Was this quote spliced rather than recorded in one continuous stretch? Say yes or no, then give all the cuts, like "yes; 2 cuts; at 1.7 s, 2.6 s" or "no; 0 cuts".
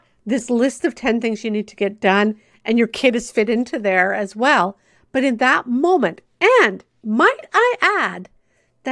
no; 0 cuts